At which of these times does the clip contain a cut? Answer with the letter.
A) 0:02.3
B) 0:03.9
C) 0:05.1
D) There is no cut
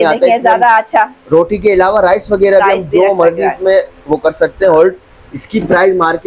D